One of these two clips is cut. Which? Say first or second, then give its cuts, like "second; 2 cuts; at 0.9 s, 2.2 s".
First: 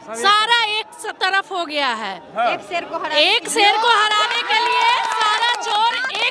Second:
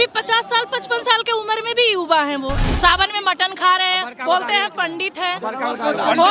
second; 1 cut; at 2.6 s